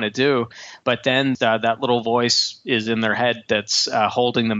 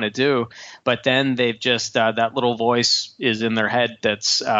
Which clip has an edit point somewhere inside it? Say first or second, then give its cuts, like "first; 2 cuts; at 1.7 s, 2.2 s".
first; 1 cut; at 1.4 s